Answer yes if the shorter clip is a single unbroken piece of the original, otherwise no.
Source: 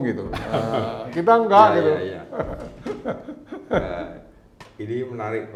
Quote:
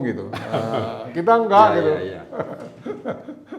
yes